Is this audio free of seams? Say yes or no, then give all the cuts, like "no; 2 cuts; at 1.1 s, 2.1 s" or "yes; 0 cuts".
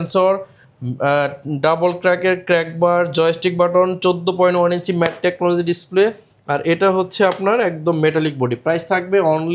yes; 0 cuts